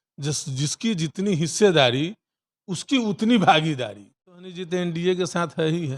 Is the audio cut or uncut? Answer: cut